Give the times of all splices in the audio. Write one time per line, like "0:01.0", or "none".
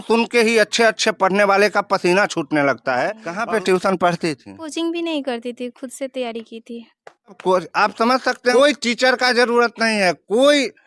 0:03.3
0:04.7
0:07.4
0:08.5